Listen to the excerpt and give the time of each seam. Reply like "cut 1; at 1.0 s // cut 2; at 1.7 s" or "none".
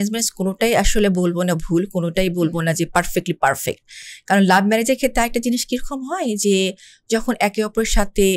none